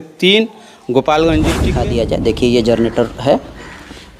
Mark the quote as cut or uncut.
cut